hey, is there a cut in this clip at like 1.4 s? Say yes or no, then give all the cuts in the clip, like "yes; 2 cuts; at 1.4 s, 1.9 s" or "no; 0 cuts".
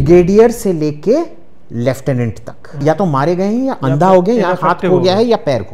no; 1 cut; at 2.8 s